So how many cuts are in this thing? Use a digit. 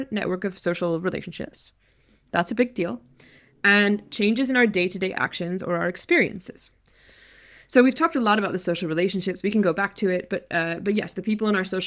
0